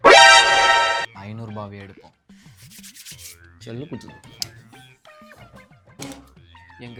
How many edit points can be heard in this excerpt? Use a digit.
0